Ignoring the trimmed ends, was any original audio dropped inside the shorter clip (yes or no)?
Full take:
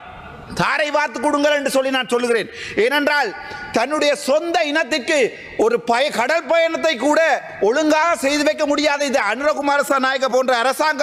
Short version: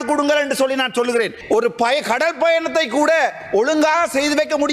yes